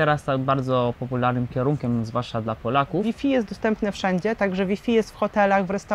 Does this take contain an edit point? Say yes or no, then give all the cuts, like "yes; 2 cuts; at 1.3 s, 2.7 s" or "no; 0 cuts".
yes; 1 cut; at 3.0 s